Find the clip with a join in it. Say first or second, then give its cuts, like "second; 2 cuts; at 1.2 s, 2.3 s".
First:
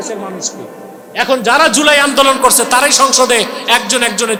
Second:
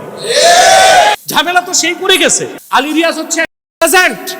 second; 2 cuts; at 1.2 s, 2.6 s